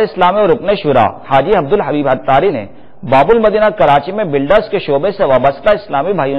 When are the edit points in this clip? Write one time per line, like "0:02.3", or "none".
0:01.2
0:02.5